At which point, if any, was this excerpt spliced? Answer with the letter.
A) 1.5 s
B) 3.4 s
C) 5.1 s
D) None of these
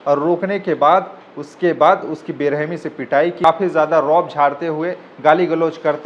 B